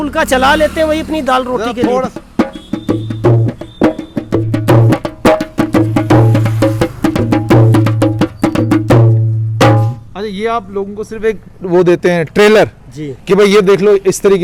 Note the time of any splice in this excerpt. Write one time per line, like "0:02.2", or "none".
none